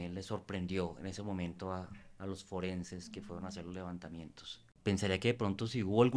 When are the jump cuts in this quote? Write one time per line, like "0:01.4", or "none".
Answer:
0:04.7

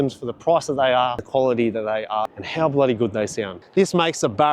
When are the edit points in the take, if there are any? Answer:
0:01.2
0:02.3
0:03.5

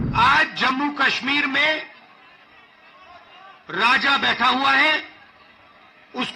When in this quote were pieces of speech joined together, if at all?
none

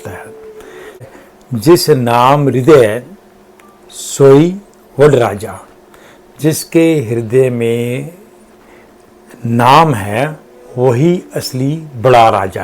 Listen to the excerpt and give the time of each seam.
0:01.1

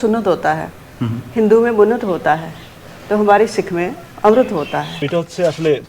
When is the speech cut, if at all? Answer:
0:05.0

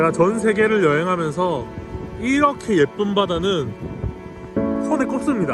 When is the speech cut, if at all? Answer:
none

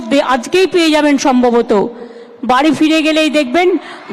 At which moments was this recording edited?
none

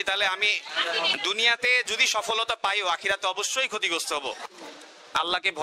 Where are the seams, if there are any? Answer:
0:04.5

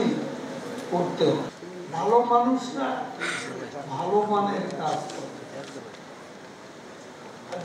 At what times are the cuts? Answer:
0:01.5

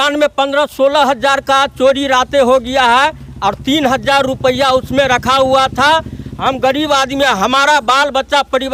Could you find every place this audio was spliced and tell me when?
none

